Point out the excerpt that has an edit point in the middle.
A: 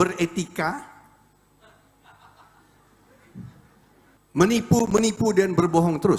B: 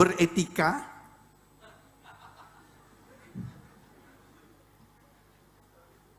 A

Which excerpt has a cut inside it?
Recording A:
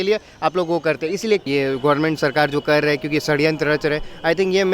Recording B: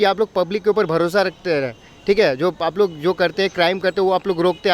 A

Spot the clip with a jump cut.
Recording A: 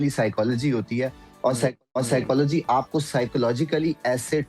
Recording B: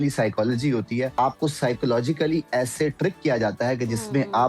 B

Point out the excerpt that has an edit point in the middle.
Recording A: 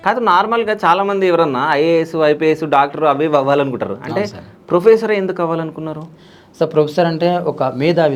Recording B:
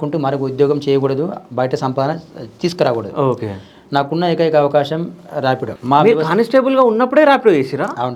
B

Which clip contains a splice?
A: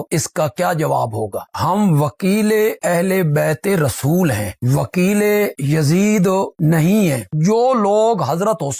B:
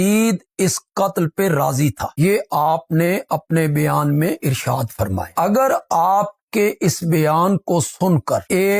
A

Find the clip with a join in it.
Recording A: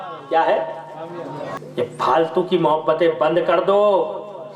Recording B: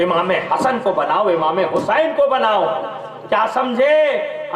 A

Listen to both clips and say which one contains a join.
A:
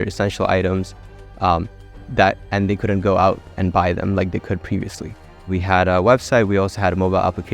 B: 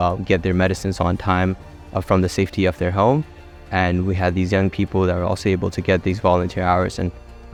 A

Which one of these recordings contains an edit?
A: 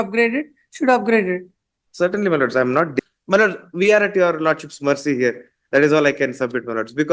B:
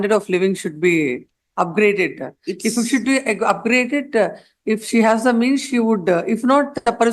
A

